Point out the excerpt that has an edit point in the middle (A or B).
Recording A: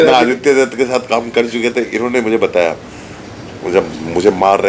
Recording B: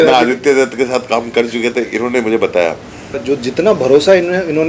B